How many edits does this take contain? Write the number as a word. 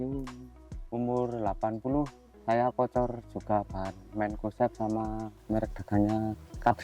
one